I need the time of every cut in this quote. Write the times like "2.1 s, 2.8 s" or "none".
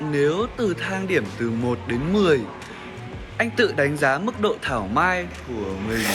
none